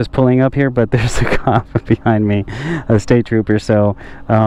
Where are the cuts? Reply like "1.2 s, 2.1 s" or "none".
none

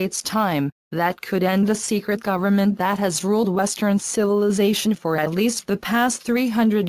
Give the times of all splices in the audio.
2.0 s

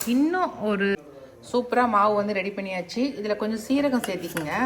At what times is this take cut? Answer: 1.0 s

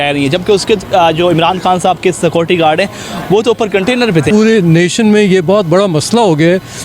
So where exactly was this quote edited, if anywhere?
4.3 s

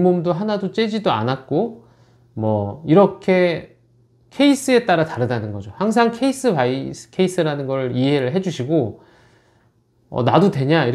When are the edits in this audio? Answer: none

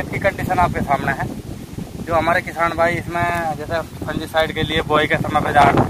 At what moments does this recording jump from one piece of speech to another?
none

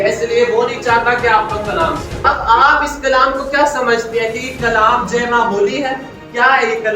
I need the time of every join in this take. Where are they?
2.1 s

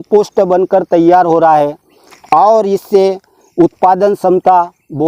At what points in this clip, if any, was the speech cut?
none

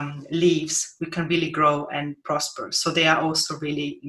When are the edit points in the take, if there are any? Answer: none

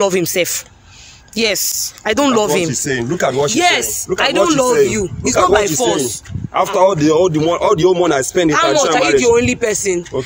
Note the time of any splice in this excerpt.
none

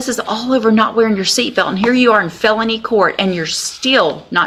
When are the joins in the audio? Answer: none

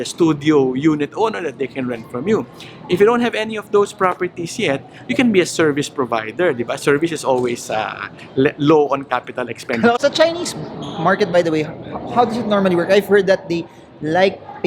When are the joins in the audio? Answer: 10.0 s

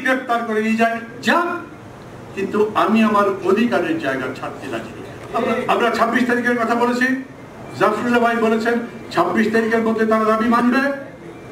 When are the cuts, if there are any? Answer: 5.1 s

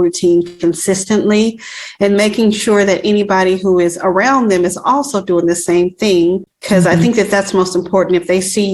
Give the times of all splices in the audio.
6.5 s

